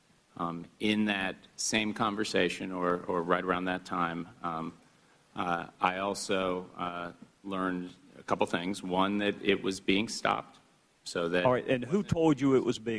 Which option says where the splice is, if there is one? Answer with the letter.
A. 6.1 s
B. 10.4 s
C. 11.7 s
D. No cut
A